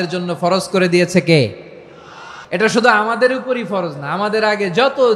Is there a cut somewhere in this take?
no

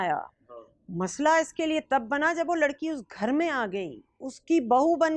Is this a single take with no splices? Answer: yes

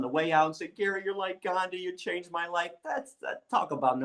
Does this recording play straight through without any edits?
no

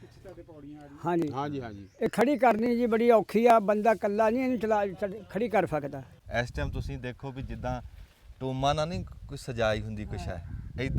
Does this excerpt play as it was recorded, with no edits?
no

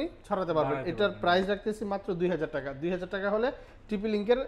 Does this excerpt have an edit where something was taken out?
no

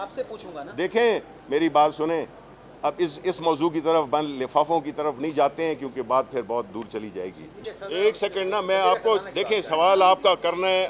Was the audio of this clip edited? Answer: yes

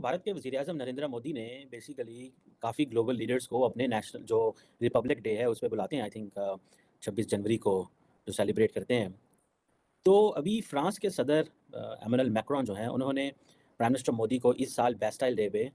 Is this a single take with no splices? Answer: yes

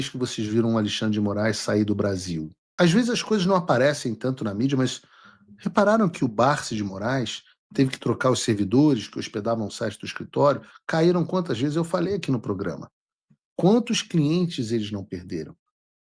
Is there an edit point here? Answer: yes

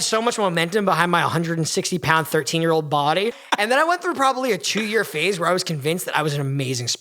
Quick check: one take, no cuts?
no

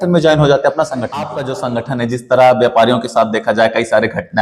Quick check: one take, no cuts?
no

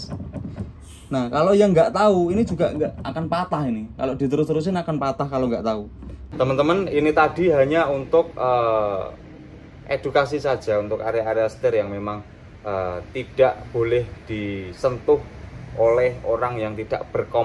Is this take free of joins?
no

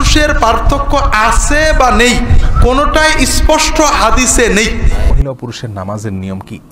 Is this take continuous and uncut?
no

